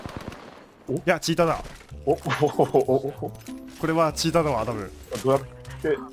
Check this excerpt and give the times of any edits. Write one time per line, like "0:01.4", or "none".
none